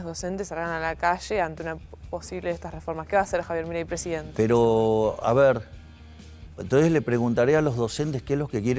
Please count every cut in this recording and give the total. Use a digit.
0